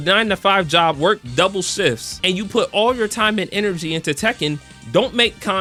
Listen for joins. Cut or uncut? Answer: uncut